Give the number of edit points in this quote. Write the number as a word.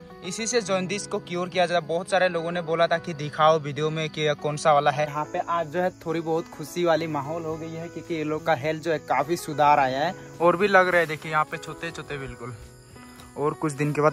two